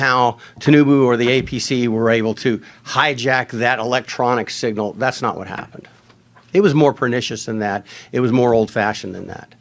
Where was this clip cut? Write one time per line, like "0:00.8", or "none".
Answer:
none